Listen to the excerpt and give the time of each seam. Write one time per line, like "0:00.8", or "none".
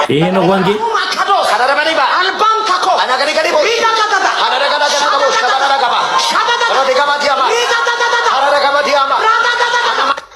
none

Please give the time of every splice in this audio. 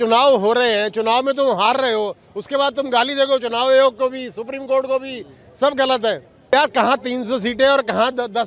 none

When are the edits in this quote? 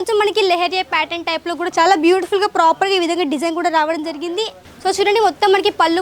0:04.6

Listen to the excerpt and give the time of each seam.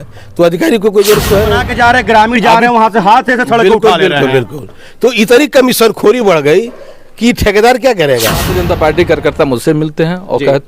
0:01.6
0:08.6

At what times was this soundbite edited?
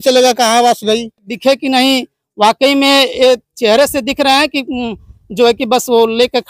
0:01.3

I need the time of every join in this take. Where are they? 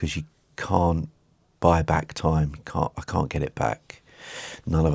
none

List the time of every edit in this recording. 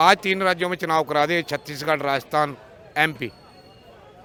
none

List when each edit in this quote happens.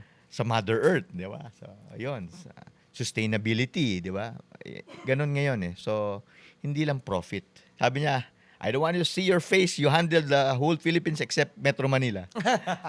0:07.6

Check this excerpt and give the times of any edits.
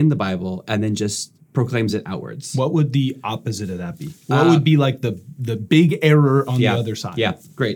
0:01.4

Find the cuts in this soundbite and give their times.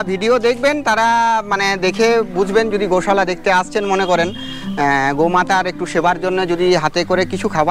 none

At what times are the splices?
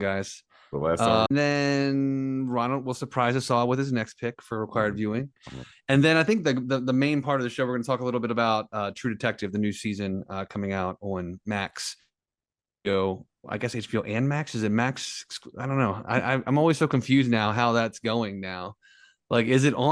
0:01.3

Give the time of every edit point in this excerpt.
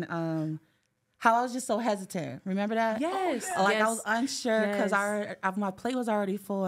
none

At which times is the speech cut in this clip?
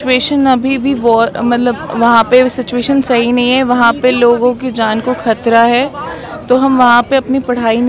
none

